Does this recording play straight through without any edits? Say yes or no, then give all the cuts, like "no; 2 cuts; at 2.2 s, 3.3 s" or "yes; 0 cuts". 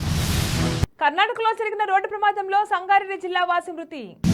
yes; 0 cuts